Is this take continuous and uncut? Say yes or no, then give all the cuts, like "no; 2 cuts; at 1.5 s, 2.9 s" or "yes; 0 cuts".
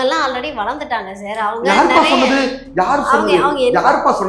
yes; 0 cuts